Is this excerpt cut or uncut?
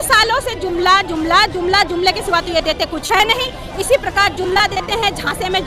uncut